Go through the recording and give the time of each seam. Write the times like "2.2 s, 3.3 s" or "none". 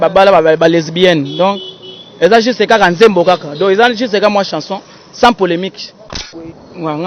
6.0 s